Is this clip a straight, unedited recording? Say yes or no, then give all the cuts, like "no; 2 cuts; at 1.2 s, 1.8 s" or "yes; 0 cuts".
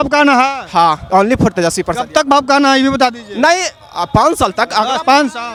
yes; 0 cuts